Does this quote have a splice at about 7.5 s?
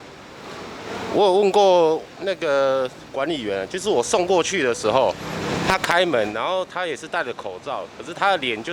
no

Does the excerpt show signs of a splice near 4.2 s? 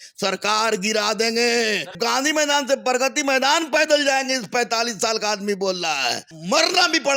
no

